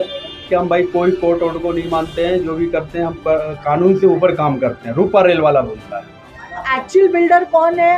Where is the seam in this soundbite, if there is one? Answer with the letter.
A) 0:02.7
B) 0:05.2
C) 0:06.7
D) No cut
C